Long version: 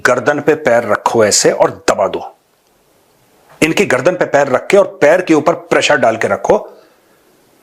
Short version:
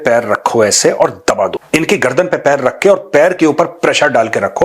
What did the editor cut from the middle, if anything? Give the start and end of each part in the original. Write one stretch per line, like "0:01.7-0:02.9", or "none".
0:02.2-0:03.5